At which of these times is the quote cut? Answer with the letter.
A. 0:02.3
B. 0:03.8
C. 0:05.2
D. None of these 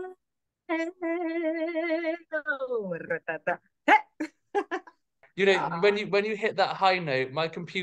C